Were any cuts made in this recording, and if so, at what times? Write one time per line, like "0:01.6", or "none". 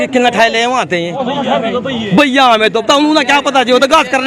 none